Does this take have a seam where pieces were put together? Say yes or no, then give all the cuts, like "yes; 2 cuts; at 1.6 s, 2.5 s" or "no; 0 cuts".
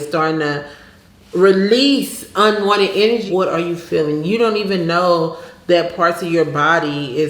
yes; 1 cut; at 3.3 s